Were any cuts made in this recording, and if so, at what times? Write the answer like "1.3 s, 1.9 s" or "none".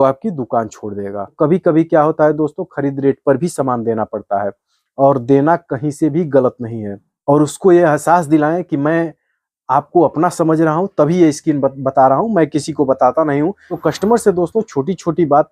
1.3 s, 7.1 s, 13.7 s